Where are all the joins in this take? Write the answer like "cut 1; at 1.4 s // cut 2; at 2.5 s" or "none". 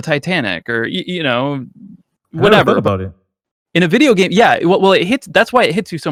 none